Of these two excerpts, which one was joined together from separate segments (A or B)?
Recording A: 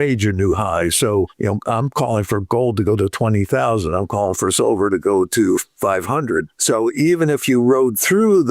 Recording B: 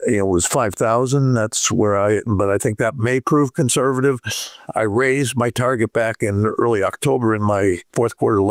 A